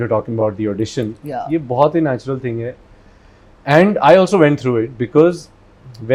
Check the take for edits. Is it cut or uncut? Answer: uncut